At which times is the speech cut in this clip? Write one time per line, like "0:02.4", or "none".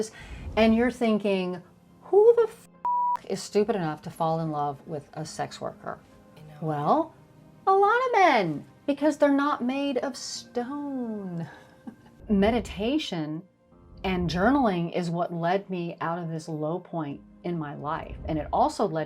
0:12.2